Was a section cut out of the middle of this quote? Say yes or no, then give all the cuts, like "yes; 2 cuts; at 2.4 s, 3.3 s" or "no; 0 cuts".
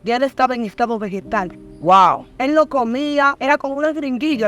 yes; 1 cut; at 3.4 s